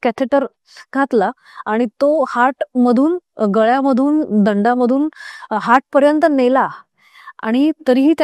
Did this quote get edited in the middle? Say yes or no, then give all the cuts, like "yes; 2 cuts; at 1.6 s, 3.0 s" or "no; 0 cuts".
no; 0 cuts